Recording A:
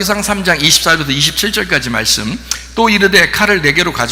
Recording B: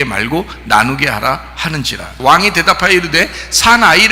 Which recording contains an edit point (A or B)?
B